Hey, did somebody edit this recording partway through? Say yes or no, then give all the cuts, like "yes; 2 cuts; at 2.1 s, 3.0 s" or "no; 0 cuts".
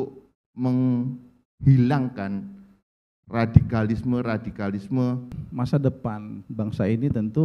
yes; 1 cut; at 5.4 s